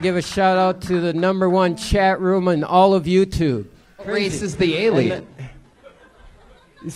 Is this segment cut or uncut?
cut